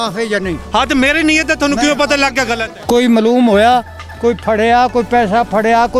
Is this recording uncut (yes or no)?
no